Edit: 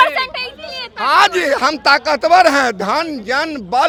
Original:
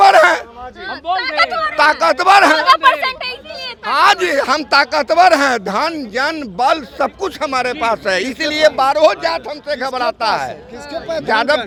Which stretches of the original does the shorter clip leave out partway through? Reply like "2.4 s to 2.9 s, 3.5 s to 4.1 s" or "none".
none

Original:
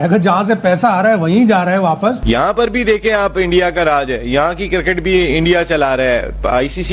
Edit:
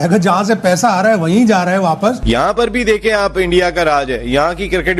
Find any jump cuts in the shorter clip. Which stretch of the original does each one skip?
none

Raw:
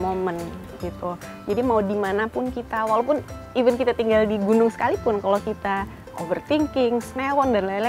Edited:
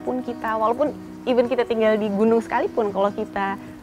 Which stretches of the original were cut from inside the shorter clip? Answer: none

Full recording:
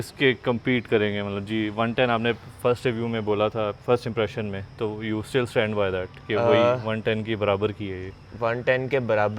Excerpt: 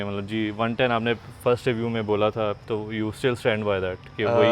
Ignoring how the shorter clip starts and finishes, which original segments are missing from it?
3.8 s to 4.7 s

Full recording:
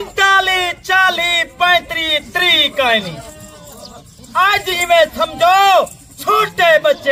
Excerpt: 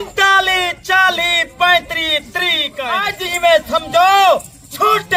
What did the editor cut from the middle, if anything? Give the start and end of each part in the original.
2.7 s to 4.1 s

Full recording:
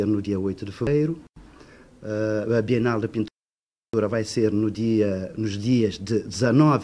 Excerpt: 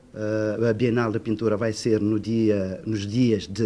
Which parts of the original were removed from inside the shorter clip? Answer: 3.3 s to 3.9 s

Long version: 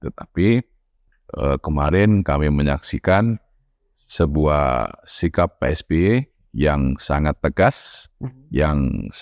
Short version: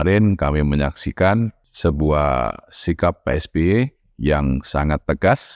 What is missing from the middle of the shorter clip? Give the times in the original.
3.5 s to 4.0 s

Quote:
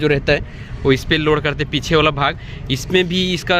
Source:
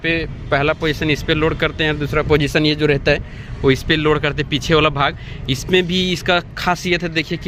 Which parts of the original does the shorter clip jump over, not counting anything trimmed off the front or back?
none

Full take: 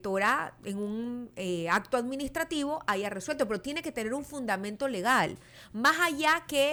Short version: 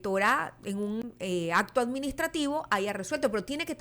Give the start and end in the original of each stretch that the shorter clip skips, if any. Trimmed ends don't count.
1.0 s to 1.2 s

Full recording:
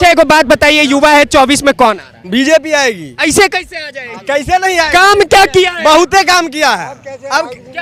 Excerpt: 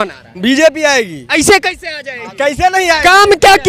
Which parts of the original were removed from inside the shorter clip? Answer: none

